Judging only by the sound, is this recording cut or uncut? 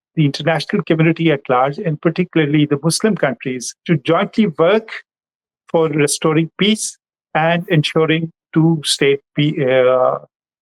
cut